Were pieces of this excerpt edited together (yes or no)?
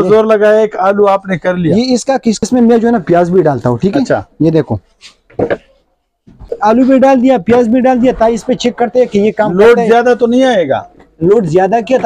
yes